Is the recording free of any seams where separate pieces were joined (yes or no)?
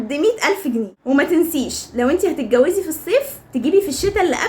no